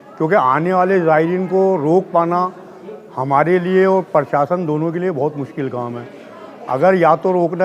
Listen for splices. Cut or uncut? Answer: uncut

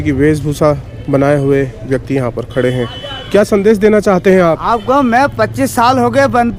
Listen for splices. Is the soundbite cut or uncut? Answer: uncut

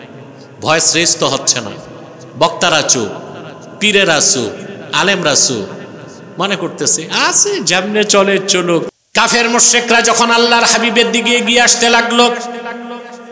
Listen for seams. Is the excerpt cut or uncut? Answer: cut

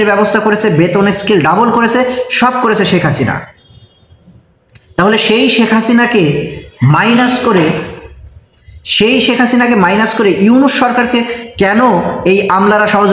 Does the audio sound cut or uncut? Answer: uncut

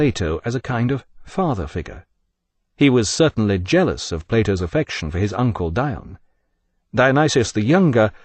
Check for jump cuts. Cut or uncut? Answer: cut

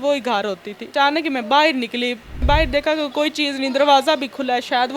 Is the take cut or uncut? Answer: cut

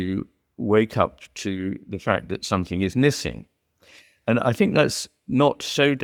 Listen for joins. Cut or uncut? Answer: uncut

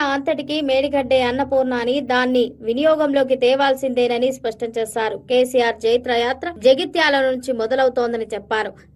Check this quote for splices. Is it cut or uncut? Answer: cut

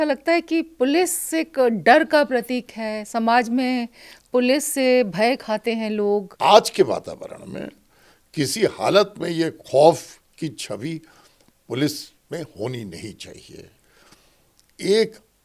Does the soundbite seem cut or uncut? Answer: cut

